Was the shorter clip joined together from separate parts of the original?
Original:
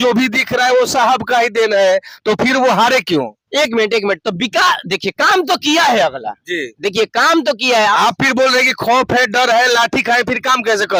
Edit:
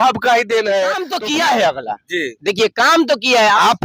yes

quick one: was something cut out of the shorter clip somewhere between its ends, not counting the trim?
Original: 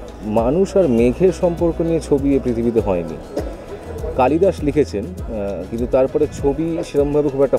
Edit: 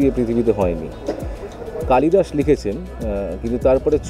no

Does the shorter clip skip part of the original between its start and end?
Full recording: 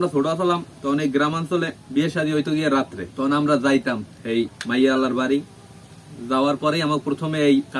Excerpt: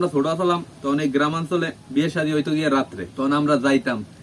no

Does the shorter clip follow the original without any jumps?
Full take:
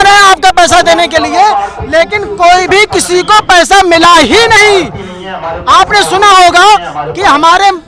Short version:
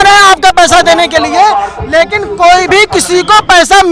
yes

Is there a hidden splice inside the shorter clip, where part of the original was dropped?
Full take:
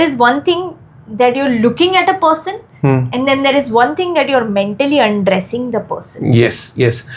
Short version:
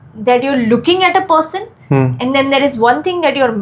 no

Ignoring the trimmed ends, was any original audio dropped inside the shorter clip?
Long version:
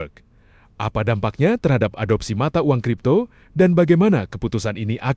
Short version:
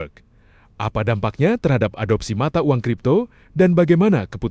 no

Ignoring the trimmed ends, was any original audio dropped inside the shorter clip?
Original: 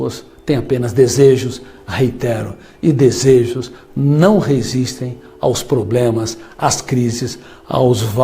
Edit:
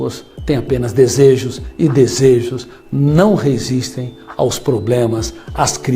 yes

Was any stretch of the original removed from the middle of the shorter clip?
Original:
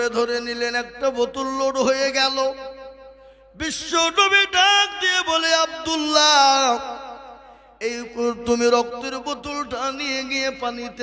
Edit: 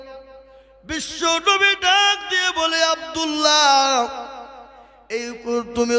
no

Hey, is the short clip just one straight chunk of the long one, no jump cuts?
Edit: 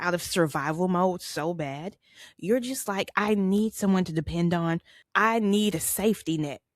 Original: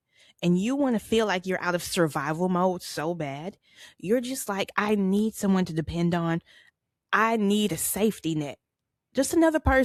no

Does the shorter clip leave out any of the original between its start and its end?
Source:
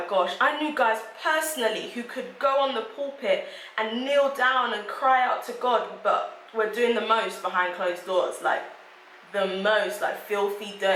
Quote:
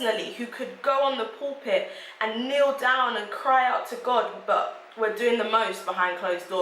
no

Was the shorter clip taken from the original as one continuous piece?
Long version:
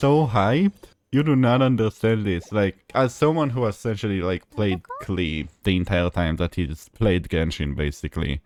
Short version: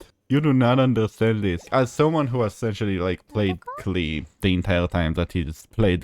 no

